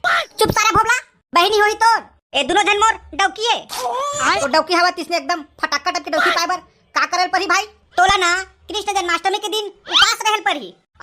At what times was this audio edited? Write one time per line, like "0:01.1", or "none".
0:04.5
0:07.8